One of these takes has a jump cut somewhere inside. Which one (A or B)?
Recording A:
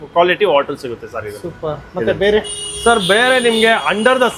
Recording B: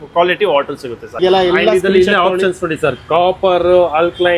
B